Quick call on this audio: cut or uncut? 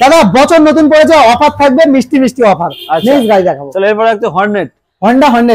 uncut